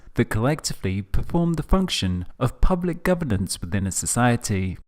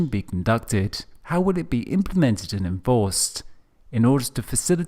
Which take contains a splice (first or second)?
second